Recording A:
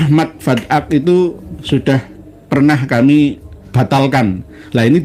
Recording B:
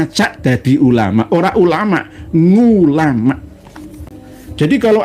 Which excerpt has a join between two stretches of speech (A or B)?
B